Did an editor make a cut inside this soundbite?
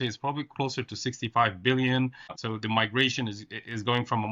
yes; 1 cut; at 2.3 s

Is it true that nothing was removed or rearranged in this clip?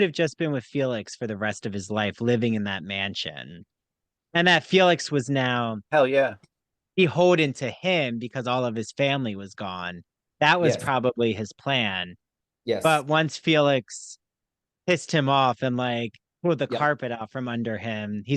yes; 0 cuts

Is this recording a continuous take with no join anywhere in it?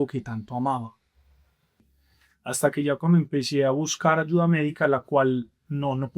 no; 1 cut; at 1.8 s

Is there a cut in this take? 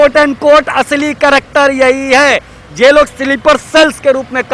no; 0 cuts

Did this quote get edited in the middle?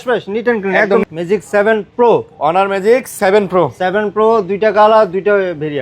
yes; 1 cut; at 1.0 s

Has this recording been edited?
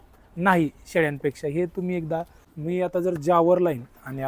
yes; 1 cut; at 2.4 s

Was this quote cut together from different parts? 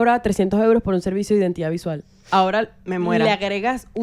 no; 0 cuts

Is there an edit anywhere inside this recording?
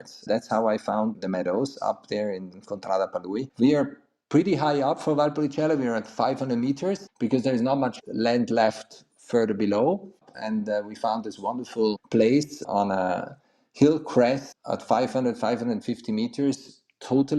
yes; 1 cut; at 10.2 s

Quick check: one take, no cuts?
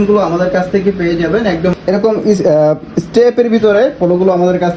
no; 1 cut; at 1.7 s

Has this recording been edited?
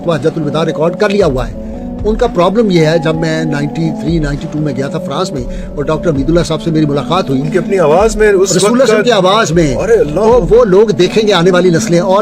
no; 0 cuts

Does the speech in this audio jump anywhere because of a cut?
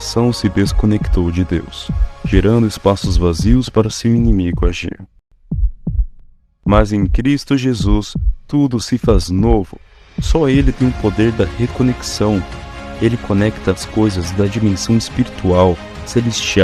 no; 0 cuts

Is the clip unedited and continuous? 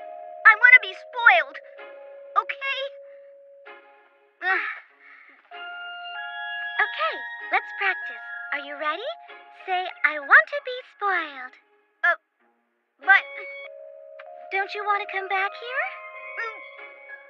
no; 1 cut; at 11.5 s

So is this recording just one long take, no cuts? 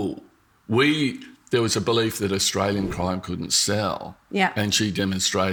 yes; 0 cuts

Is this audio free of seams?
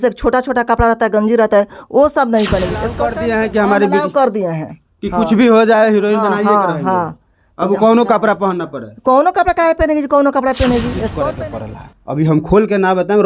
no; 2 cuts; at 3.0 s, 11.2 s

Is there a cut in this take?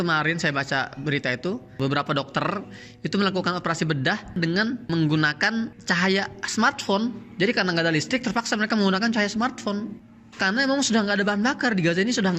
no; 0 cuts

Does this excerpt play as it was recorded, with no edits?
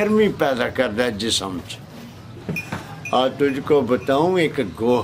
no; 1 cut; at 2.3 s

